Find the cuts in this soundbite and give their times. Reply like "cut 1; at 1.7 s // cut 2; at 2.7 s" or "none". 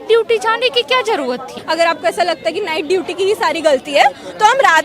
cut 1; at 1.5 s